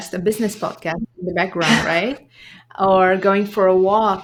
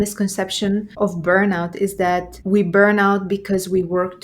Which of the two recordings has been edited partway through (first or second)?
second